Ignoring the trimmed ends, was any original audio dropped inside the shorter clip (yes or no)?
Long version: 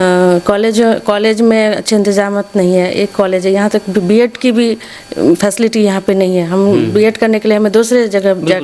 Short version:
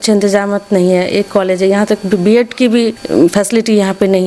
yes